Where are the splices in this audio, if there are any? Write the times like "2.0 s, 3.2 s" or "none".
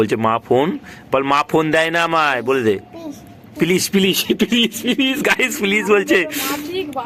none